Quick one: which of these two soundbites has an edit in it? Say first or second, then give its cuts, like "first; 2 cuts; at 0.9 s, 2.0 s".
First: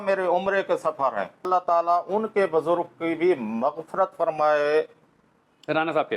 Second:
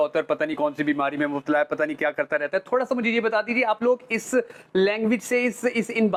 first; 1 cut; at 1.5 s